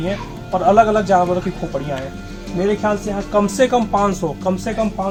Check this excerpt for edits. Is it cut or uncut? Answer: uncut